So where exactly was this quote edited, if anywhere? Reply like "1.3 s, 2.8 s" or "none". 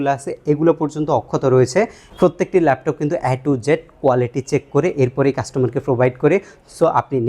2.0 s